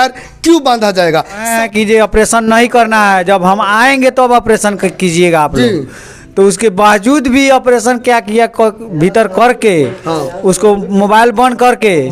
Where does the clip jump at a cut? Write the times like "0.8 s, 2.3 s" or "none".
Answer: 1.5 s